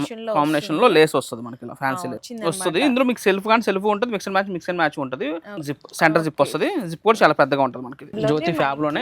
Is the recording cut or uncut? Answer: cut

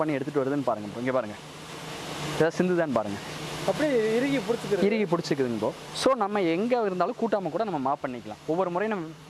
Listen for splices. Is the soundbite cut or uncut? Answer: uncut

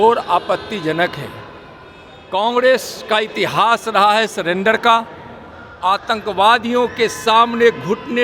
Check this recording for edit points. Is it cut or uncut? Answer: uncut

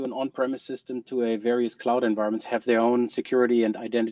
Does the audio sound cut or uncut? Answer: uncut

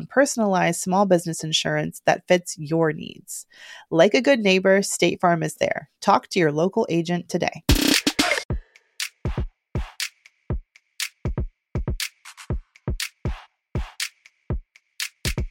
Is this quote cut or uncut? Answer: cut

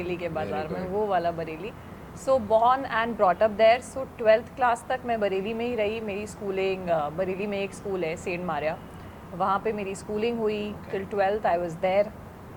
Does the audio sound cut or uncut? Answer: uncut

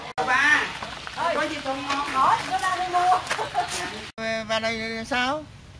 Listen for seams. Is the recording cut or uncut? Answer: cut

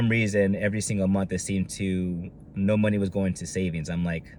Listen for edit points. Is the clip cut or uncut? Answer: uncut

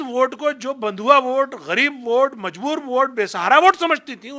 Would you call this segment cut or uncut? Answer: uncut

